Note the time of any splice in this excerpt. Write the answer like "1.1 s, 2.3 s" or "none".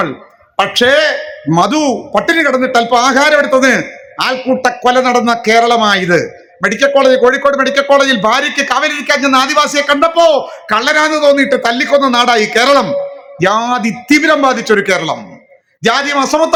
none